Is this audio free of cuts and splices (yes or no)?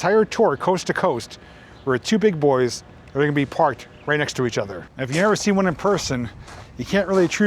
no